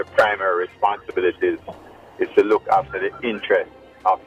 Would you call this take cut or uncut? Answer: uncut